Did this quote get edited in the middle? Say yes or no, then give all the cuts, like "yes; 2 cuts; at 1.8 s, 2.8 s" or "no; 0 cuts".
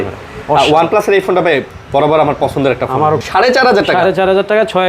yes; 1 cut; at 3.2 s